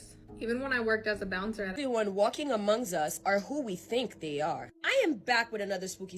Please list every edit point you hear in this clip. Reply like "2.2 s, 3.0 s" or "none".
1.8 s